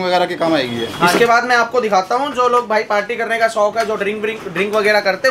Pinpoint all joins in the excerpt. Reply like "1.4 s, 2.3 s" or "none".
1.1 s